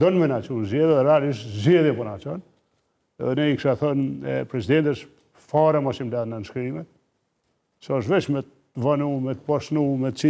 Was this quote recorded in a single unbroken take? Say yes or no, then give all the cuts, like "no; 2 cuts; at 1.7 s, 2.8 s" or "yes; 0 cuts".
yes; 0 cuts